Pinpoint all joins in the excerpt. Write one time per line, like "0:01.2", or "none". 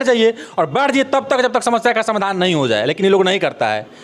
none